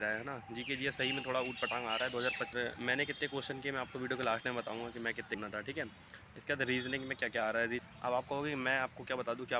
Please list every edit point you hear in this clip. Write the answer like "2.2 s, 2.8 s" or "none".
2.5 s, 5.4 s, 7.8 s